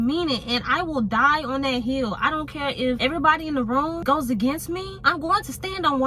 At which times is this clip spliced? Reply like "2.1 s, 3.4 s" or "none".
3.0 s, 4.0 s, 5.0 s